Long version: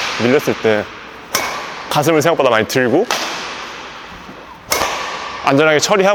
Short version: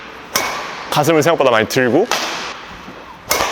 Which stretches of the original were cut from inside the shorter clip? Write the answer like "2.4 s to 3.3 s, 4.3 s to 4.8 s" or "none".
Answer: 3.6 s to 4.0 s